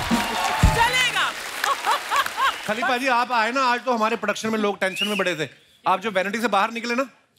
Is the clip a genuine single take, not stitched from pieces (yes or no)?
no